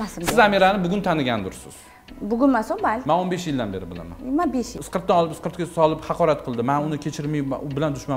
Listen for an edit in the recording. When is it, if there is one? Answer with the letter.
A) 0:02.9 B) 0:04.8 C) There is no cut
B